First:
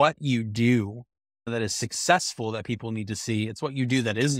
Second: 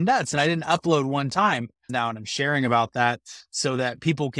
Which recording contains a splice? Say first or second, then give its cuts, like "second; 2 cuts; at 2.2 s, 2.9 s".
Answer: second; 1 cut; at 1.9 s